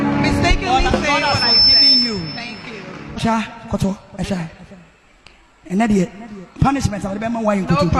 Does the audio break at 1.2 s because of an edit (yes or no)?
no